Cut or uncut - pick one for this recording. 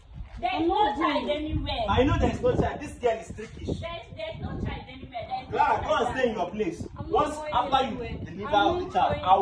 uncut